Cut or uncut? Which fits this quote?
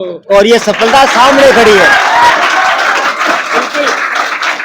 uncut